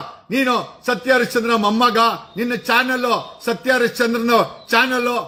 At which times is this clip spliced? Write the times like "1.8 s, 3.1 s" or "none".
none